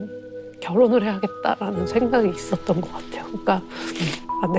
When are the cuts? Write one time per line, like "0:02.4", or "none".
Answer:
none